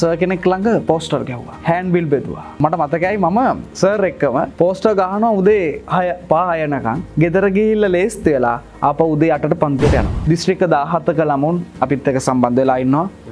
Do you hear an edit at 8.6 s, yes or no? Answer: no